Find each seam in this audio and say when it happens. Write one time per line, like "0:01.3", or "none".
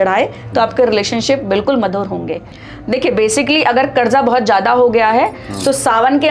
0:02.5